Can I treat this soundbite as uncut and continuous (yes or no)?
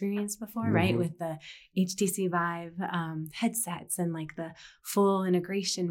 yes